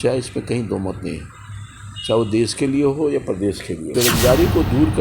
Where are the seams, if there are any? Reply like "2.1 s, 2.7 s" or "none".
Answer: 3.9 s

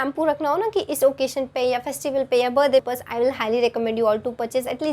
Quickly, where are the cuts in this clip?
2.9 s

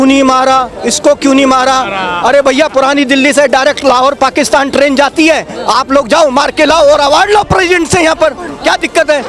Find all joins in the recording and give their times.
none

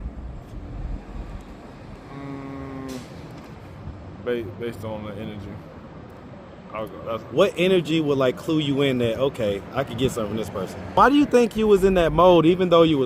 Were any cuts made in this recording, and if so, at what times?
11.0 s

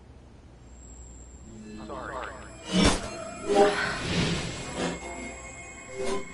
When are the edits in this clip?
0.8 s, 1.4 s

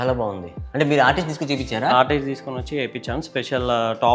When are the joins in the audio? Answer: none

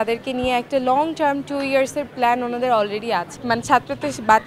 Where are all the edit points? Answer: 3.4 s

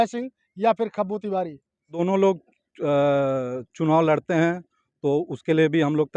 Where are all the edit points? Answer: 1.9 s

